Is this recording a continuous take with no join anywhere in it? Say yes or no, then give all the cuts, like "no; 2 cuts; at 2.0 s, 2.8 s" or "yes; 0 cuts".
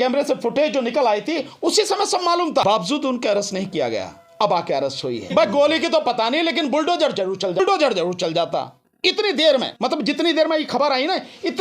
no; 4 cuts; at 2.6 s, 5.3 s, 7.6 s, 9.7 s